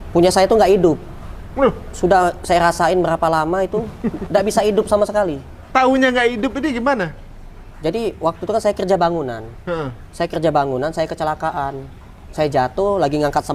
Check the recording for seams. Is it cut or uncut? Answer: uncut